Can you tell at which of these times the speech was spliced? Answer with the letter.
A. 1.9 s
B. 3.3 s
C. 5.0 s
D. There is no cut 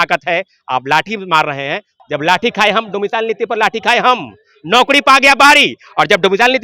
A